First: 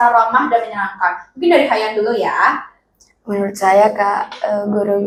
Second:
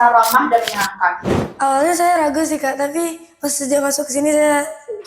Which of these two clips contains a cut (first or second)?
second